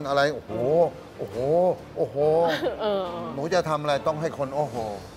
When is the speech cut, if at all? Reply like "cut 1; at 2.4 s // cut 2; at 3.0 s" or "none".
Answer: none